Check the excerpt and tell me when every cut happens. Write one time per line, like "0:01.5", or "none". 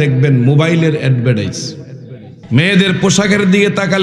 0:02.4